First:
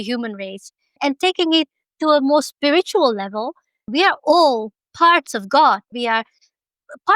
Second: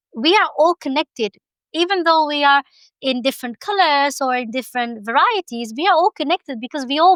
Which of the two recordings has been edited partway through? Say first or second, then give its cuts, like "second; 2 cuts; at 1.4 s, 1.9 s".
first; 3 cuts; at 1.0 s, 3.8 s, 5.9 s